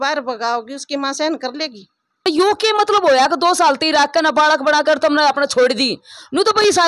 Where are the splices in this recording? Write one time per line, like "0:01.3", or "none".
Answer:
0:02.3